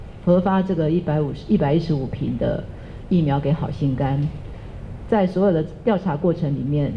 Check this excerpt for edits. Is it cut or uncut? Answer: uncut